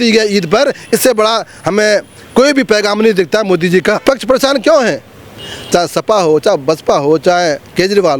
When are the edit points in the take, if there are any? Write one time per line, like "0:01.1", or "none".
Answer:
0:04.0